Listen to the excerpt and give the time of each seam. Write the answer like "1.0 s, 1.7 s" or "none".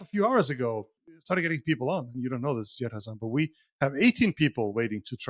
1.1 s